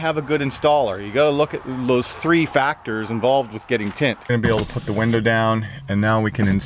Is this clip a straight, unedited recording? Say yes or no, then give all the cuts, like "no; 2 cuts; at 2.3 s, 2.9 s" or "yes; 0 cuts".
no; 1 cut; at 4.2 s